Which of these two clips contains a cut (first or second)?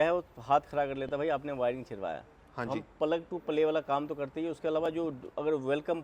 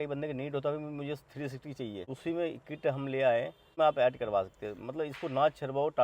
second